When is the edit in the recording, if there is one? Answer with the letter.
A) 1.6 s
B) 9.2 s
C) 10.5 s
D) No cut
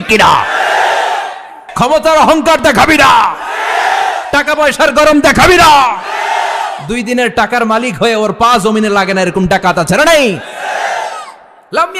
A